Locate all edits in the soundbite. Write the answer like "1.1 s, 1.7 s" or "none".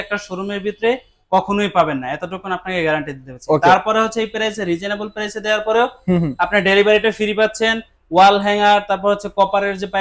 none